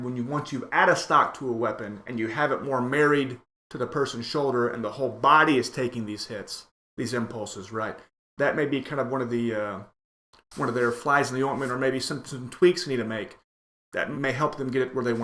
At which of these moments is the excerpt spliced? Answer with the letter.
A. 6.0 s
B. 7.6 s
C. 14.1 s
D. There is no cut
C